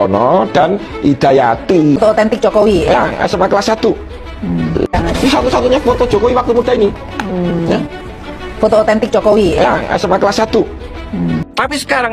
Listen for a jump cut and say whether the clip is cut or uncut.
cut